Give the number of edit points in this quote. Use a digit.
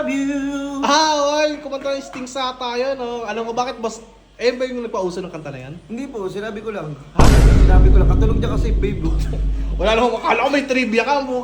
0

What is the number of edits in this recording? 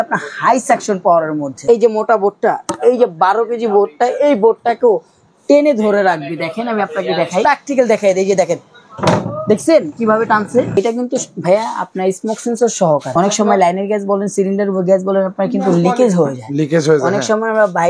4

